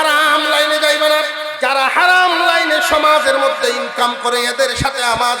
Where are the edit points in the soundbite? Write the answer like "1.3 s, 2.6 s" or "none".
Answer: 1.4 s